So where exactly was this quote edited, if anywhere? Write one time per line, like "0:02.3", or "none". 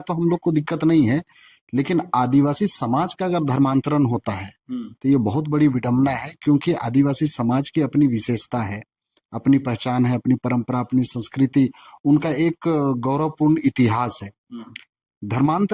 none